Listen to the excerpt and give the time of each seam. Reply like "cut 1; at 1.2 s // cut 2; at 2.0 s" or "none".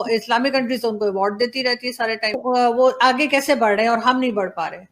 cut 1; at 2.4 s